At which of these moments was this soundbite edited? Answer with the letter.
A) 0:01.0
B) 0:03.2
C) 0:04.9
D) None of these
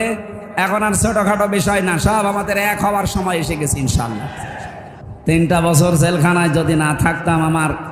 C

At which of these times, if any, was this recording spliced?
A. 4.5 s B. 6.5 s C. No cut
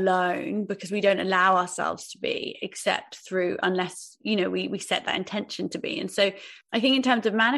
B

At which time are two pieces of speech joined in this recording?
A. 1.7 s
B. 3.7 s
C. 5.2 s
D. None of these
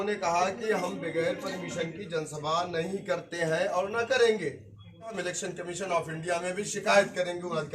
C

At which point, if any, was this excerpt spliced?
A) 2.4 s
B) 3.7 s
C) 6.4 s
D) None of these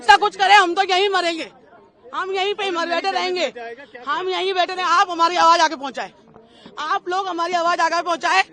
D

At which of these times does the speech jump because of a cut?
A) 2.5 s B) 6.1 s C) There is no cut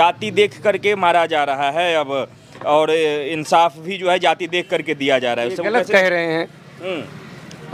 C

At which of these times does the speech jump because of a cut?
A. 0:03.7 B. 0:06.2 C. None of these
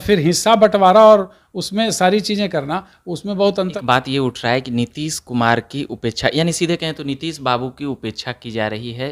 A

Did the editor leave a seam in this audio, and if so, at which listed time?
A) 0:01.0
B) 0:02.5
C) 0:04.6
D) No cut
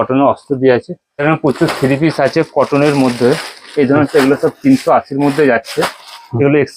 A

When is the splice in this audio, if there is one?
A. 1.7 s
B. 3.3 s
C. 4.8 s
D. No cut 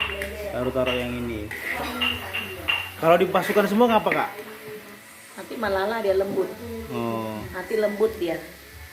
A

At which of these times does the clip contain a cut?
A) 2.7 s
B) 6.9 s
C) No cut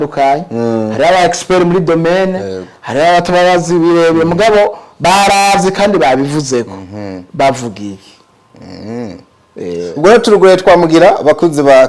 C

